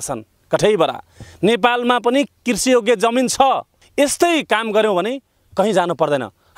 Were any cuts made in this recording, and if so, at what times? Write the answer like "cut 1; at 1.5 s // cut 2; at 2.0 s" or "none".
cut 1; at 3.8 s